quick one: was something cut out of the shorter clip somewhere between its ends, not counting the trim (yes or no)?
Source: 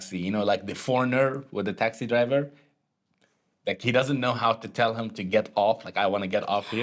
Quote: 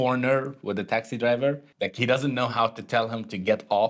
yes